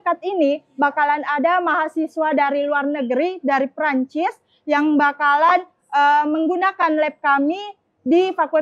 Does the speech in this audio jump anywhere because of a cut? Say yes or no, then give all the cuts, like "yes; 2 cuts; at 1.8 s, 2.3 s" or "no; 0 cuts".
no; 0 cuts